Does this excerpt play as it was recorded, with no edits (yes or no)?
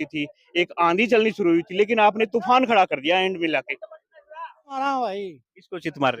no